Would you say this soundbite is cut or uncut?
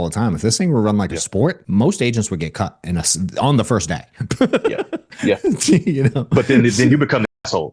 cut